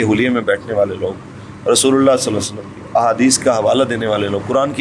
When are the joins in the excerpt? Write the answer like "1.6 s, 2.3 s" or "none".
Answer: none